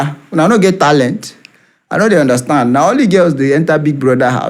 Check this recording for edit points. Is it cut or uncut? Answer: uncut